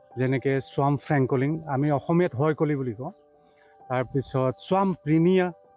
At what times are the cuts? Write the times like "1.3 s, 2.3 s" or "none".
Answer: none